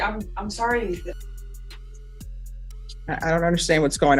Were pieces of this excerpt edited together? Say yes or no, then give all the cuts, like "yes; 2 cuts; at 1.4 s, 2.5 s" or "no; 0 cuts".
yes; 2 cuts; at 1.2 s, 3.0 s